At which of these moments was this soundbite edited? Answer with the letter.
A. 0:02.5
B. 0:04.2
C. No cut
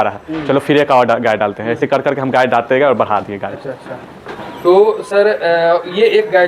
C